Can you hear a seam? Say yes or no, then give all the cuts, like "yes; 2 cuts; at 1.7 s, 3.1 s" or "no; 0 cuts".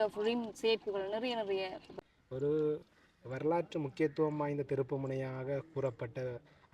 yes; 1 cut; at 1.8 s